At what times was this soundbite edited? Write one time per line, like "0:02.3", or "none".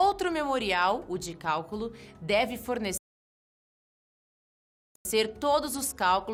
none